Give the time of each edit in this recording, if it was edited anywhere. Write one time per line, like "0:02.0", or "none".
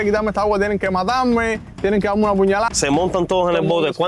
0:02.7